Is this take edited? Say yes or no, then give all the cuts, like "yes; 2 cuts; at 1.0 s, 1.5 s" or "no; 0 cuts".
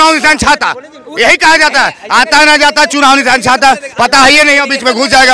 no; 0 cuts